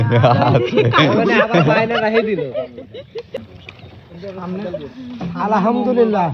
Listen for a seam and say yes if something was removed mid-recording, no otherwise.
yes